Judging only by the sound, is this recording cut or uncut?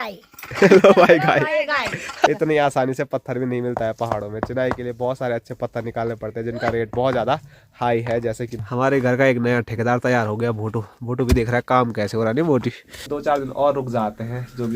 cut